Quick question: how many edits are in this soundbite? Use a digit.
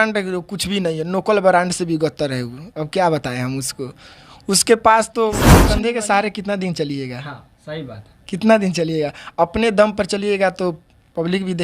1